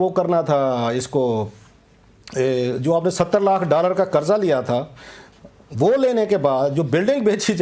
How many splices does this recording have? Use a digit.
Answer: 0